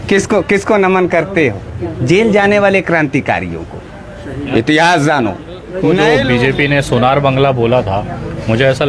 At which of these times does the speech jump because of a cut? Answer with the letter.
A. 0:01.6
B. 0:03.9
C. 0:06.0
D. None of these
C